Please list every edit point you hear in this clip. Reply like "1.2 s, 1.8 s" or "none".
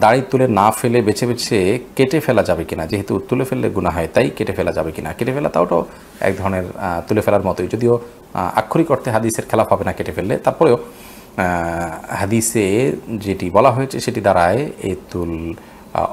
none

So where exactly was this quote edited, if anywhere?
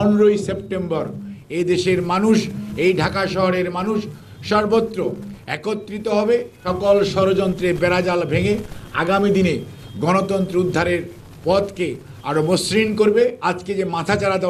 6.5 s, 13.4 s

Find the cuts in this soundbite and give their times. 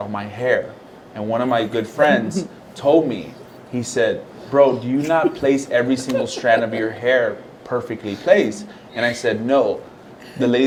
none

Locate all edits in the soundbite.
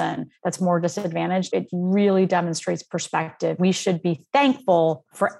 1.5 s, 3.6 s

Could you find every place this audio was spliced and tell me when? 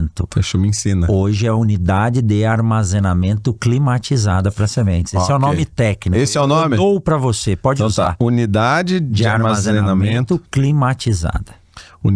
none

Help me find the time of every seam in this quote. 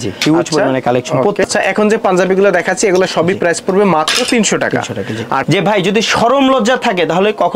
1.5 s, 5.1 s

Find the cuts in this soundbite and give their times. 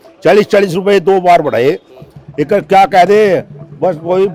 none

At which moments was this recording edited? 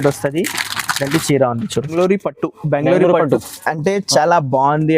1.9 s

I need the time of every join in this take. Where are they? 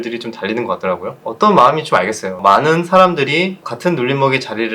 1.2 s, 2.3 s

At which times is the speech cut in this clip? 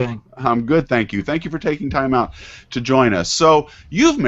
2.4 s

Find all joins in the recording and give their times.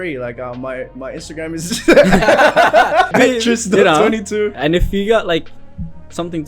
3.1 s, 4.6 s

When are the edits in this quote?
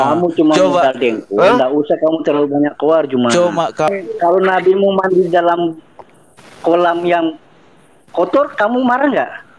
3.9 s

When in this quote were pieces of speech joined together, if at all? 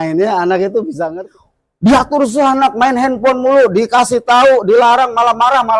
1.2 s

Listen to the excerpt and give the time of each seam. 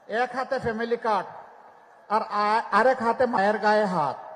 3.4 s

